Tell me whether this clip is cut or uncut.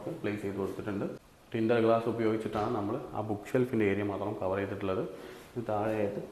cut